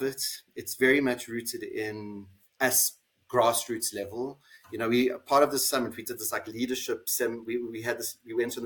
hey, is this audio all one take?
yes; 0 cuts

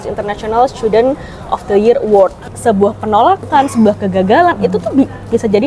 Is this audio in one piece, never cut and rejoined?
no; 1 cut; at 2.5 s

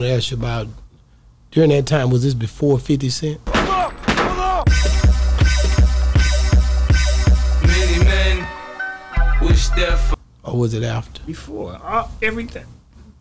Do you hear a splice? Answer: no; 0 cuts

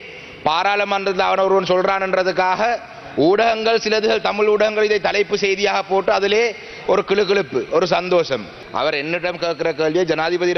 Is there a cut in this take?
yes; 1 cut; at 8.6 s

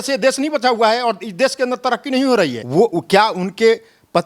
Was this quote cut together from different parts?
yes; 1 cut; at 2.6 s

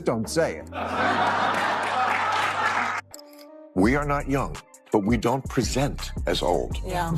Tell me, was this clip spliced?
yes; 1 cut; at 3.0 s

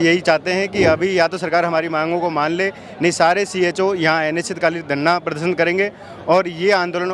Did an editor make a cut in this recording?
no; 0 cuts

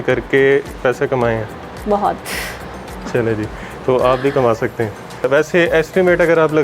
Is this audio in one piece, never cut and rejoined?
no; 1 cut; at 5.3 s

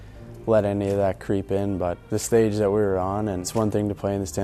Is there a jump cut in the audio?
yes; 2 cuts; at 2.0 s, 3.5 s

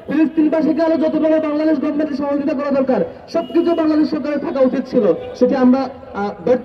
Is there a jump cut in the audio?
no; 0 cuts

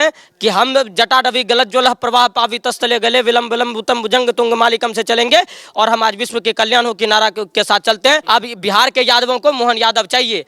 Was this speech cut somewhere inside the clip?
yes; 1 cut; at 8.2 s

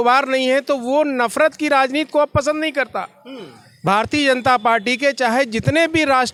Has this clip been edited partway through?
no; 0 cuts

